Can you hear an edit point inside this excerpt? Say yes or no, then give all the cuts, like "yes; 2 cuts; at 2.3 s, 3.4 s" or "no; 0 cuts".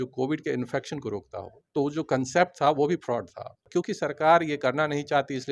yes; 1 cut; at 3.6 s